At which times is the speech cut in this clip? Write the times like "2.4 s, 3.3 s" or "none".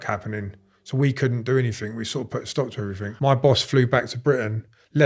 3.0 s